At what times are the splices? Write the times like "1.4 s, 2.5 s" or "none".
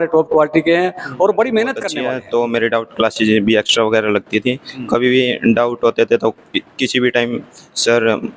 1.9 s

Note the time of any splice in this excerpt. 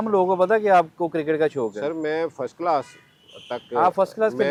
none

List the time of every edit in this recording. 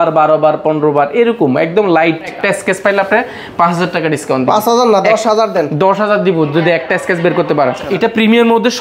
2.4 s, 7.9 s

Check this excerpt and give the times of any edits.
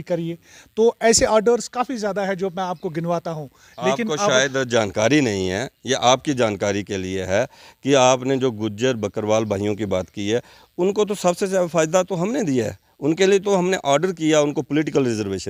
none

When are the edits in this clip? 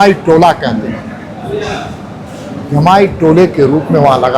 none

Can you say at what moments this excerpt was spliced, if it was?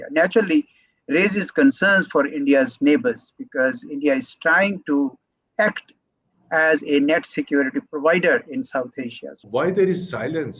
9.4 s

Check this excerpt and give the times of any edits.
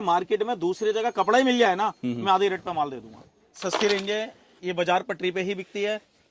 3.6 s

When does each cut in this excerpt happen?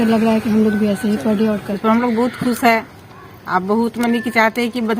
1.7 s

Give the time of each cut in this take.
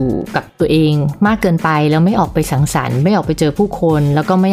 1.1 s

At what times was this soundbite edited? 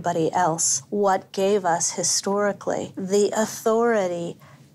1.3 s, 2.9 s

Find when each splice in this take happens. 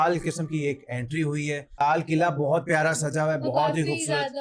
1.8 s

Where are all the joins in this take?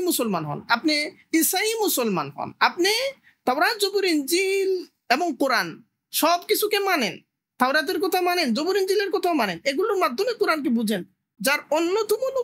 11.4 s

